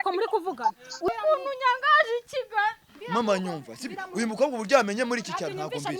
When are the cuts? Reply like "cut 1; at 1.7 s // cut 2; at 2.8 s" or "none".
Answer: cut 1; at 1.0 s